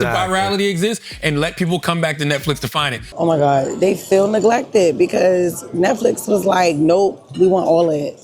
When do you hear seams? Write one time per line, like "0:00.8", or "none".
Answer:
0:03.1